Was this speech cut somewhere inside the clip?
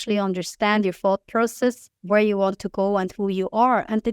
yes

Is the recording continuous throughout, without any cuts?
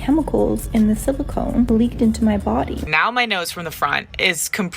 no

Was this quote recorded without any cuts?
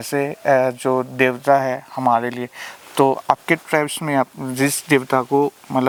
yes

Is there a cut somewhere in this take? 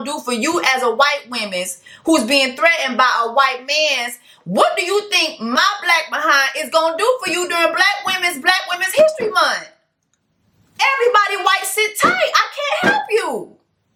no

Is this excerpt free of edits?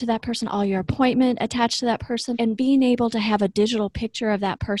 no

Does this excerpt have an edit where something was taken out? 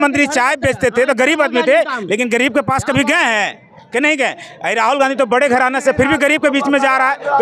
no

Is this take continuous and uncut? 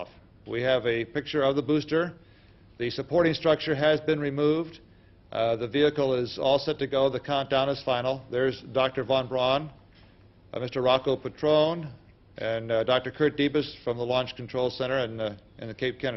no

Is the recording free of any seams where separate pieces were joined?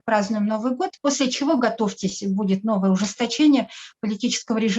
yes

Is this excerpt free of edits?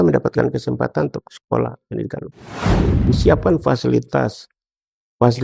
no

